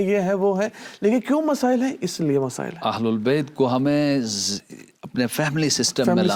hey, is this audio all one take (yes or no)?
yes